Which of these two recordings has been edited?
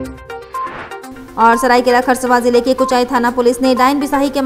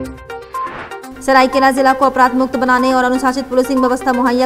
second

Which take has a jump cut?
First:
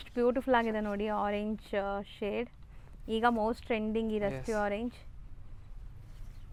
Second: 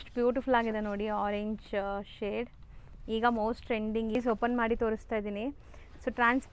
second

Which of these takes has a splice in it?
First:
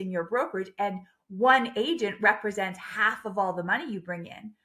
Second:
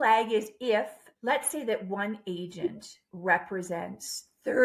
second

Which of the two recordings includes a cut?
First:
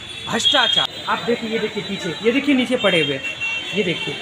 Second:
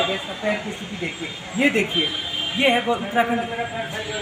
first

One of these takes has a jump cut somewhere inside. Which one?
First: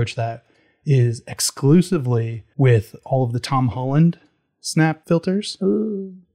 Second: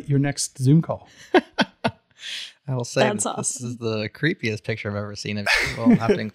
first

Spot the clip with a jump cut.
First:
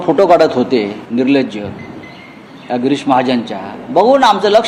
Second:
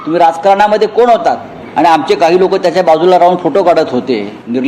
second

